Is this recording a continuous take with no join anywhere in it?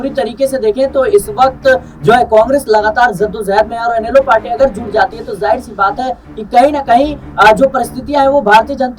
yes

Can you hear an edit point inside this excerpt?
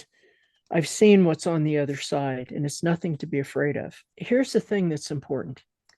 yes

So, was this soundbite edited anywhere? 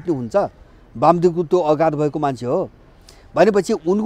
no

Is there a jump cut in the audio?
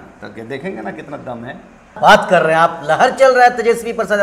yes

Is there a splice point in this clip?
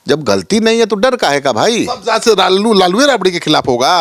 no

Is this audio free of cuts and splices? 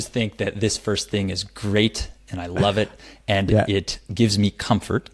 yes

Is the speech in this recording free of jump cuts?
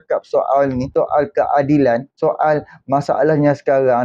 no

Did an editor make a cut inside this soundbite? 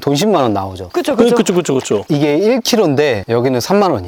no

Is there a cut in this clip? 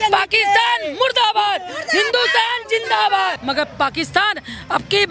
yes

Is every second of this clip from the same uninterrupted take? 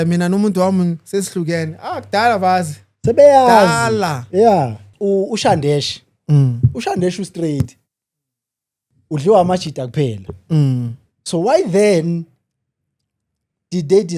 no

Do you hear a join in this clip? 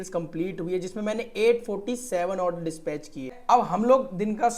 yes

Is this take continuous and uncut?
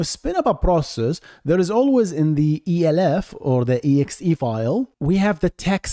yes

